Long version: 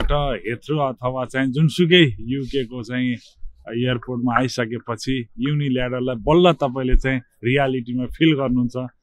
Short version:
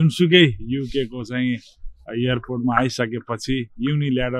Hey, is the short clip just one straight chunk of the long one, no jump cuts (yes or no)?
yes